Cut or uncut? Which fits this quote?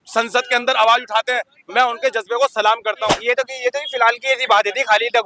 cut